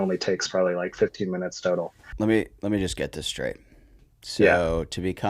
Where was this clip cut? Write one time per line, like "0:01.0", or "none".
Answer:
0:02.0